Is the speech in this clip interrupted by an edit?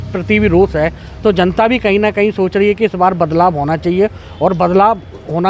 no; 0 cuts

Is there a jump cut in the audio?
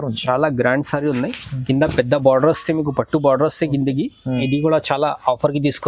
yes; 1 cut; at 4.4 s

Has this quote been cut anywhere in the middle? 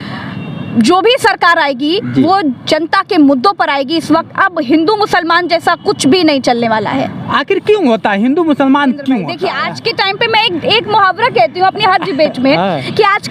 yes; 1 cut; at 9.4 s

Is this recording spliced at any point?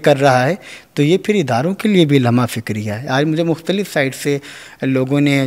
no; 0 cuts

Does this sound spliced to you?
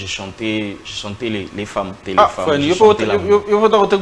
yes; 1 cut; at 2.0 s

